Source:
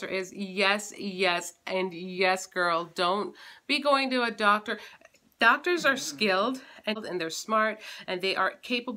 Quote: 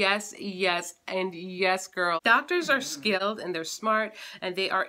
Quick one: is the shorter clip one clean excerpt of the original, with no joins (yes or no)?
no